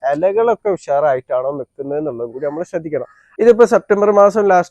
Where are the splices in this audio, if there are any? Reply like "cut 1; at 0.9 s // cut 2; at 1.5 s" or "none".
cut 1; at 3.2 s